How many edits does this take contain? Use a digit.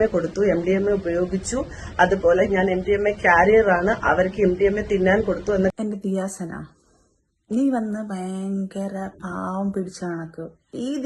1